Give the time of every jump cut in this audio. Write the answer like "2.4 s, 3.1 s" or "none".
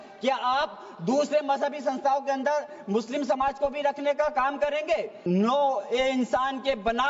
5.2 s